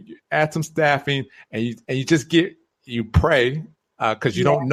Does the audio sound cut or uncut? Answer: uncut